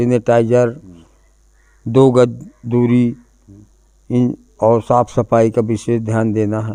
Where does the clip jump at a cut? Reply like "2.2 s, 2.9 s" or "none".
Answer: none